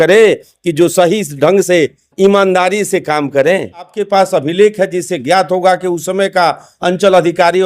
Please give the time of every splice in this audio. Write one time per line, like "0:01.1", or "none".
0:04.0